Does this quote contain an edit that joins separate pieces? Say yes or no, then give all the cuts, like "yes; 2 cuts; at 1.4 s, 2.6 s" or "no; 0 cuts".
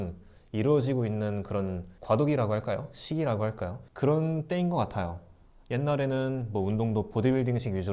no; 0 cuts